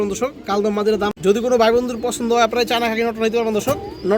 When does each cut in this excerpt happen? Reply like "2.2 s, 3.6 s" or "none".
1.3 s